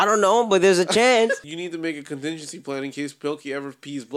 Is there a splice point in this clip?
yes; 1 cut; at 1.5 s

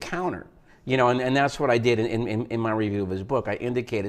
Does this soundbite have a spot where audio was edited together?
yes; 1 cut; at 2.0 s

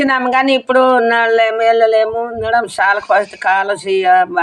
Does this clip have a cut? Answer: no; 0 cuts

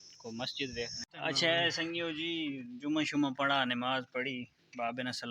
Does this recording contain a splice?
yes; 1 cut; at 1.0 s

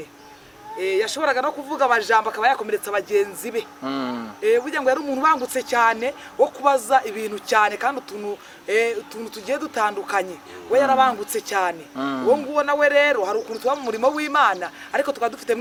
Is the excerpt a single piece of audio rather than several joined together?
yes; 0 cuts

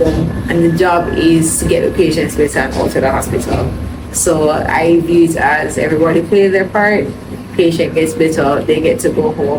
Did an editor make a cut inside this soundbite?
no; 0 cuts

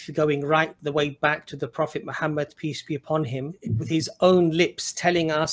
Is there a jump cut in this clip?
yes; 1 cut; at 3.7 s

